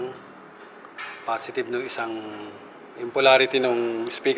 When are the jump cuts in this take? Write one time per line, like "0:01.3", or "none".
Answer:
none